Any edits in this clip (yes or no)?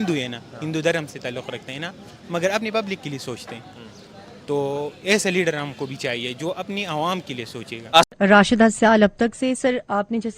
yes